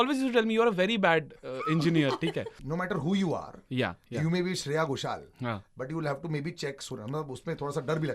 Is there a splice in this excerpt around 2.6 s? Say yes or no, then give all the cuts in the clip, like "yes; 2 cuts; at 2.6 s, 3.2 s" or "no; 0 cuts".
yes; 1 cut; at 2.6 s